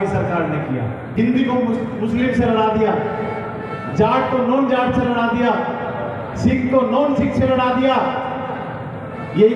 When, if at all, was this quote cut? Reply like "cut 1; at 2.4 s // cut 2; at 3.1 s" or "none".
cut 1; at 1.1 s